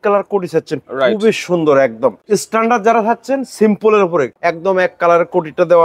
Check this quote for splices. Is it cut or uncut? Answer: cut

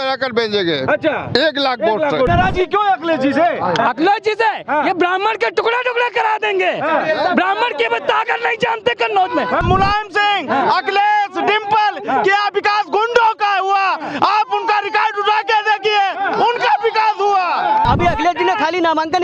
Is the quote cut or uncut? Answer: cut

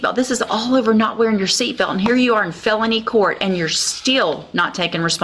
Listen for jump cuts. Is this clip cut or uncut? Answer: uncut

